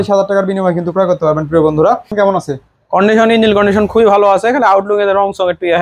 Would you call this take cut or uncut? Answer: cut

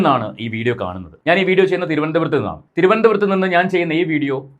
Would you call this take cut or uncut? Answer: uncut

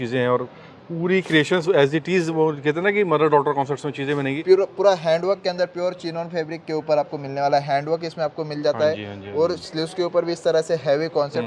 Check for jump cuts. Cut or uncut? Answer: cut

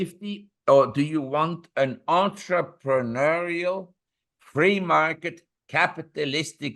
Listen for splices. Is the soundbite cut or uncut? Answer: uncut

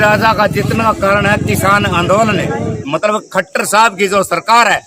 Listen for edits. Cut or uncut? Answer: cut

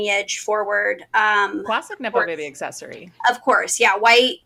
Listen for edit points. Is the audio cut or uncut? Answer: uncut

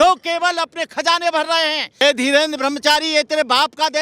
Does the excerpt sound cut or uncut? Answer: cut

